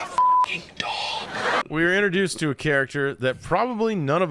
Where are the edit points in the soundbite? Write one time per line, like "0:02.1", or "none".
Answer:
0:01.6